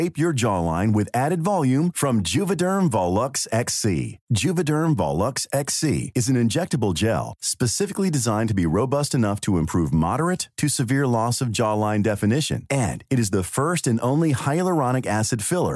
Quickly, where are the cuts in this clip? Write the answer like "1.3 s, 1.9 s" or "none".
none

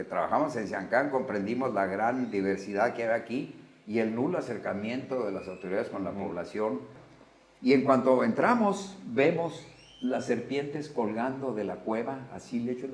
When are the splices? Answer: 7.0 s

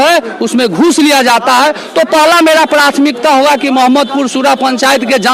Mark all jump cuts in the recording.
none

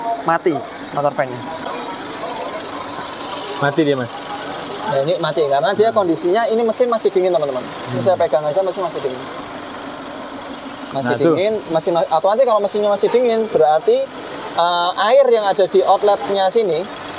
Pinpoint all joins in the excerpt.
none

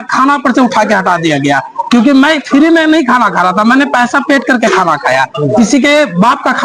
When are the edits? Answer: none

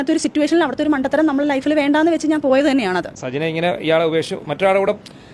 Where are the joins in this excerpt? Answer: 3.1 s

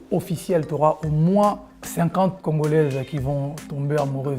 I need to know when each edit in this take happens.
2.4 s

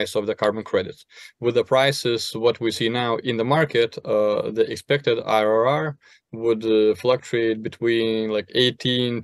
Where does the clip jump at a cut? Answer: none

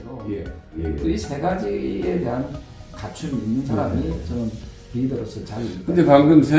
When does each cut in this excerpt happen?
1.0 s

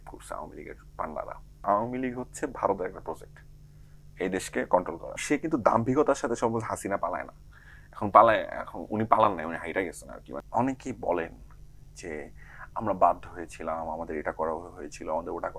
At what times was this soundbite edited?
1.6 s, 5.2 s, 10.4 s

